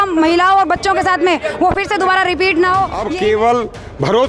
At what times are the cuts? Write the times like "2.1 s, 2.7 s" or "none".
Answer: 3.0 s